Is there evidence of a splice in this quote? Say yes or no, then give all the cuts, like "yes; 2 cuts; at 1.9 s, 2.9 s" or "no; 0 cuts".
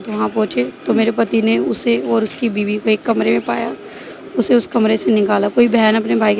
no; 0 cuts